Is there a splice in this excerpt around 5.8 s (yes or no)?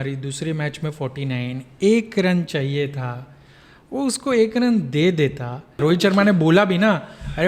yes